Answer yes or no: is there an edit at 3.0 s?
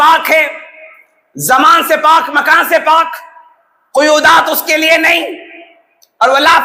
no